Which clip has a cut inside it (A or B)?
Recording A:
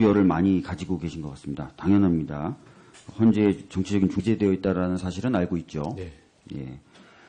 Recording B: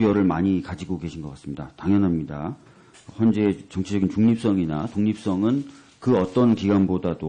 B